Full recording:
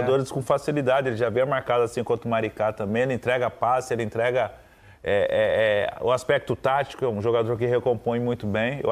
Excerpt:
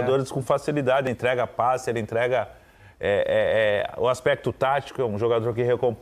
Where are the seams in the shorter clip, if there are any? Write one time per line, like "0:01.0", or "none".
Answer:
0:01.1